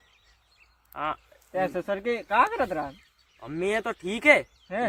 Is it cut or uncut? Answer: uncut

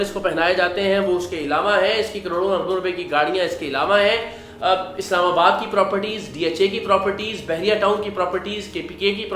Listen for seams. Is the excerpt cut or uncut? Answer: uncut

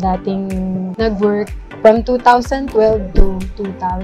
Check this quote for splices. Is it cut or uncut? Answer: cut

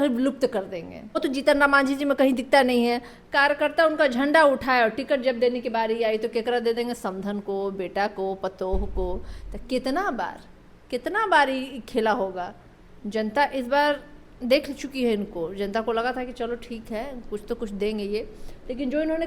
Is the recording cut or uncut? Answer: cut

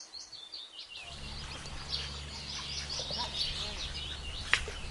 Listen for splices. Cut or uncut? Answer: uncut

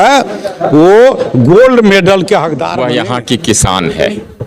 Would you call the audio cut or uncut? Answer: cut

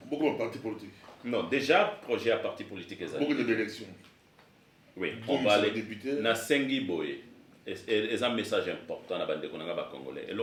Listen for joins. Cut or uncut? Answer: uncut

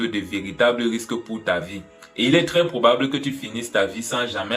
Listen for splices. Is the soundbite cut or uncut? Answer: uncut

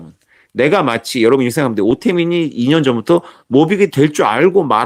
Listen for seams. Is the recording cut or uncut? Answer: uncut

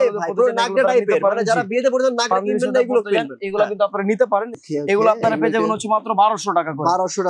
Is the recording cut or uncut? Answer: cut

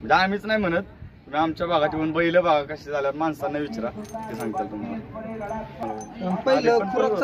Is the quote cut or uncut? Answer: cut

